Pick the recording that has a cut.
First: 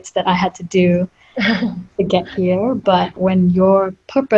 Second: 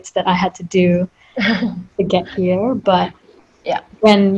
first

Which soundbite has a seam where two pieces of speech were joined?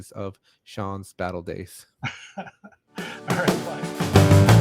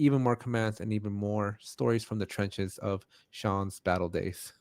first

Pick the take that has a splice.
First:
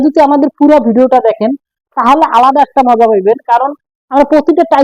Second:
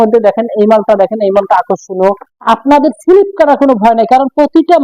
second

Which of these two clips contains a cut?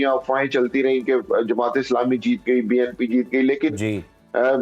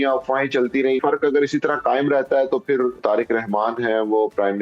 second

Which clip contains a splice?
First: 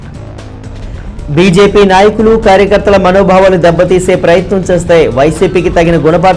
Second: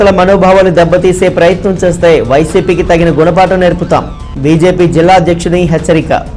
first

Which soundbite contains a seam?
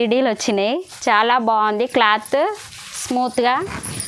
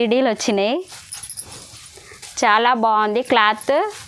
first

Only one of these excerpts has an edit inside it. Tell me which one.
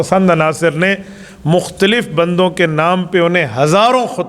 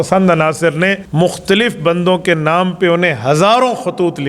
second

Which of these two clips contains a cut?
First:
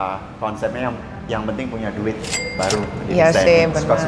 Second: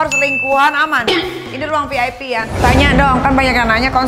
second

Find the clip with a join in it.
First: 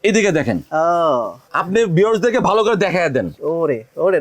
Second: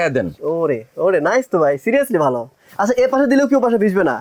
first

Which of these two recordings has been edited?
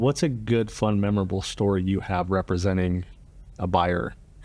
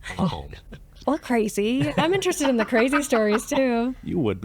second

